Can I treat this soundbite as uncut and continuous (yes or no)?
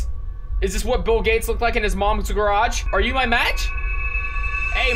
no